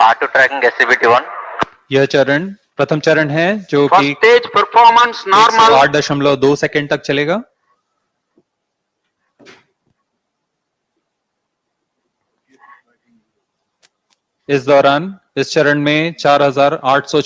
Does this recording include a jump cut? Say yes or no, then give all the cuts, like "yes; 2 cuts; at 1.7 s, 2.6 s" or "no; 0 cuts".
yes; 1 cut; at 2.6 s